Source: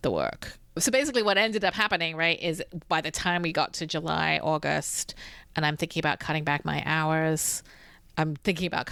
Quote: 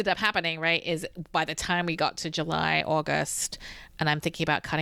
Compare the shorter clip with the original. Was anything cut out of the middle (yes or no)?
no